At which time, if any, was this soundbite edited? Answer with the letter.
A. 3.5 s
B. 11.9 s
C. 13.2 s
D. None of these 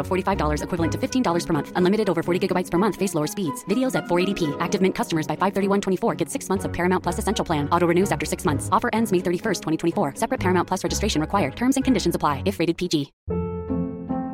D